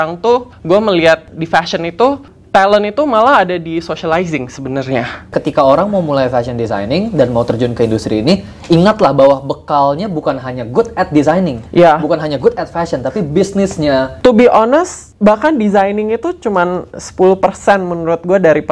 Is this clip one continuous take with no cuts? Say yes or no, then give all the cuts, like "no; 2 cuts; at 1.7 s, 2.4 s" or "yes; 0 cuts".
no; 2 cuts; at 5.3 s, 14.1 s